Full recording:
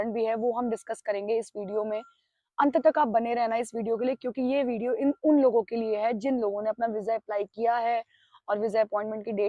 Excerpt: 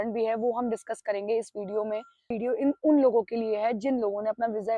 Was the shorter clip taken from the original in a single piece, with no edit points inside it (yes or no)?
no